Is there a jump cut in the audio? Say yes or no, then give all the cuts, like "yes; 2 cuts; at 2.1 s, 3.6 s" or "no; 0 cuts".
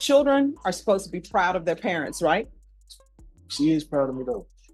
no; 0 cuts